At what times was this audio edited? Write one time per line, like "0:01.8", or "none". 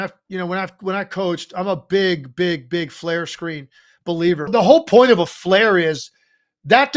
0:04.5